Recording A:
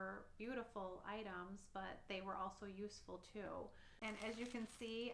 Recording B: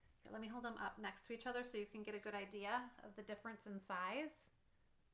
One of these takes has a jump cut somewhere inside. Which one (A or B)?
A